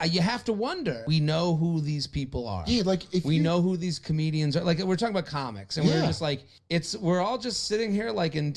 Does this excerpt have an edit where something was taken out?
no; 0 cuts

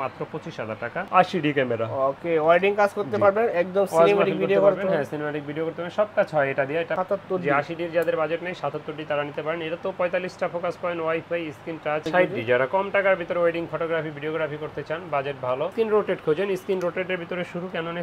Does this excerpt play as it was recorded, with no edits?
no; 4 cuts; at 1.1 s, 7.0 s, 12.0 s, 15.7 s

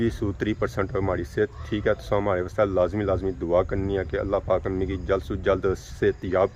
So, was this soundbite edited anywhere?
no; 0 cuts

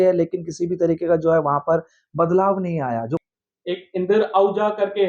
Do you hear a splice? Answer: yes; 1 cut; at 3.2 s

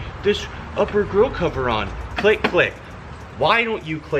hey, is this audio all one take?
yes; 0 cuts

